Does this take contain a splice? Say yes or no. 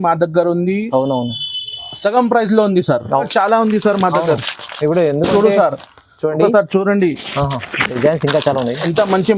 yes